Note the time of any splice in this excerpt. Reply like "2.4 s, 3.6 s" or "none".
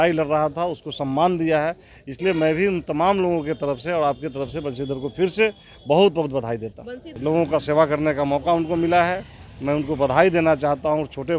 7.1 s